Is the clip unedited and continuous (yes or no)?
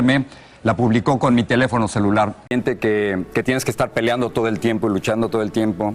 yes